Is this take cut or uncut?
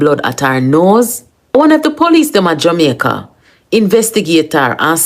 cut